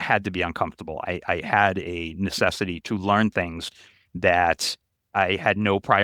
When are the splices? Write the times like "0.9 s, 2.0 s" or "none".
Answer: 2.8 s, 5.1 s